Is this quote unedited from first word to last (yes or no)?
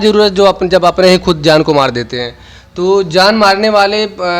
yes